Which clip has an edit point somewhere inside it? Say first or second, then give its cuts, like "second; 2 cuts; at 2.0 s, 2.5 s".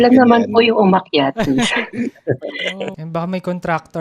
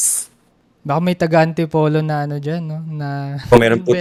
first; 1 cut; at 2.9 s